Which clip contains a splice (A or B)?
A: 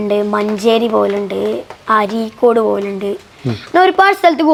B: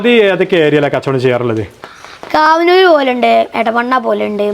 B